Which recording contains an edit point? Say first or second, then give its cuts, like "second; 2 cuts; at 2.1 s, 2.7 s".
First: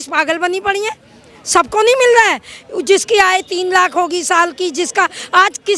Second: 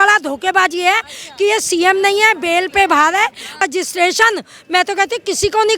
second; 1 cut; at 3.6 s